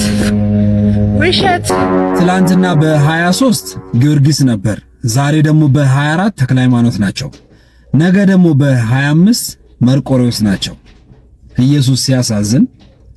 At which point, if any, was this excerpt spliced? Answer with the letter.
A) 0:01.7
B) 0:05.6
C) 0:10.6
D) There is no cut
A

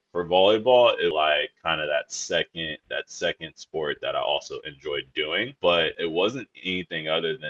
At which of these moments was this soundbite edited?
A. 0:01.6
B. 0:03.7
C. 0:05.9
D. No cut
C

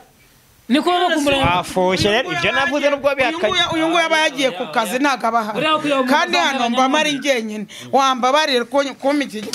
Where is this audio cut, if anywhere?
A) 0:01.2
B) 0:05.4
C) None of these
C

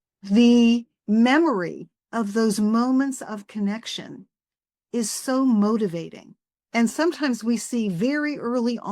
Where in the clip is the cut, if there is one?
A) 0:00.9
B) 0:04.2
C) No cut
A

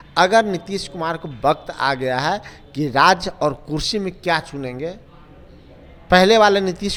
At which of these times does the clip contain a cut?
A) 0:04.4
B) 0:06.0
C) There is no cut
C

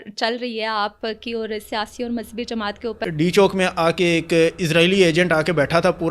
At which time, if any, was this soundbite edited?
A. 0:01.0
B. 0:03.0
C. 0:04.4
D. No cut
B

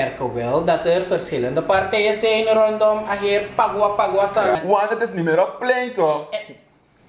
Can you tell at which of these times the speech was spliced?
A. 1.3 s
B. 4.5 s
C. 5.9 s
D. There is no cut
B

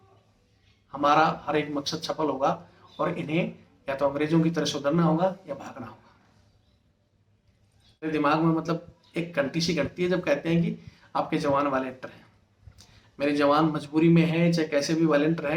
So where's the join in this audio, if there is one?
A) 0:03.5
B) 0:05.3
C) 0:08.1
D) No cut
C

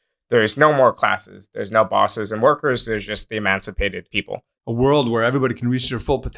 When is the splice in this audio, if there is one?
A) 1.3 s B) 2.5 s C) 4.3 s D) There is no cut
C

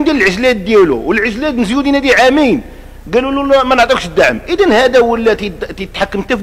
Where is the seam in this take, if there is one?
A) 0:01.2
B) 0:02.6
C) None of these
C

